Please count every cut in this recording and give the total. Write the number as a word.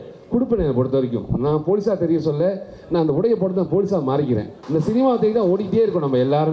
one